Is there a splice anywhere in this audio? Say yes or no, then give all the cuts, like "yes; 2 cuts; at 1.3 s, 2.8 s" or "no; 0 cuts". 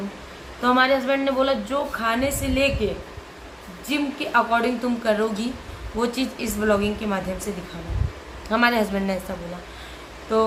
no; 0 cuts